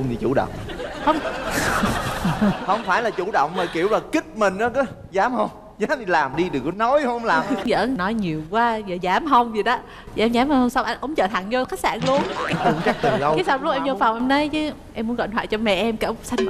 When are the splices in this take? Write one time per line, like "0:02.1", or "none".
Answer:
0:07.7
0:12.4